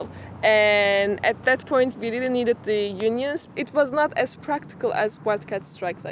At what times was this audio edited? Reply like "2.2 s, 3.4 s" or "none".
3.5 s

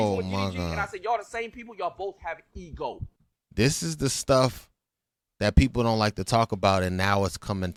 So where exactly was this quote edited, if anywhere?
none

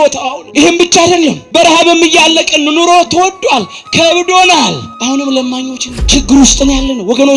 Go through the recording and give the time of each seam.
1.4 s, 5.9 s

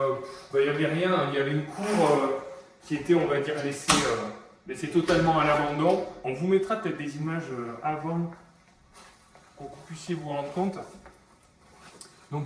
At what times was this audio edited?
none

